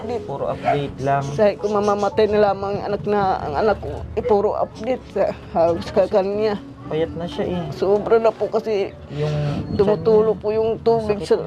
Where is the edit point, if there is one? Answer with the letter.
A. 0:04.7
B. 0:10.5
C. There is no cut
C